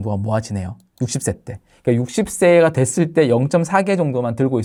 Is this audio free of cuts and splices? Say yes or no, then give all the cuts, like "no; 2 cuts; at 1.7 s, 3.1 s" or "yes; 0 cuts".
yes; 0 cuts